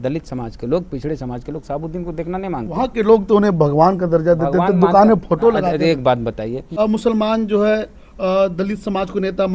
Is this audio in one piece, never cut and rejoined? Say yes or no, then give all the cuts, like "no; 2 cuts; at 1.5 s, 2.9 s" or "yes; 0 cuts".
no; 1 cut; at 6.8 s